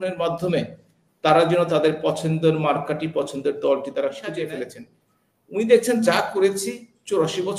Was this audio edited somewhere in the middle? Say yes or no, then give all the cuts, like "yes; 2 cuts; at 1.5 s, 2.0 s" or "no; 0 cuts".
yes; 1 cut; at 4.4 s